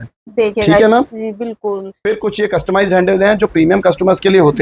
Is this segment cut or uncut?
cut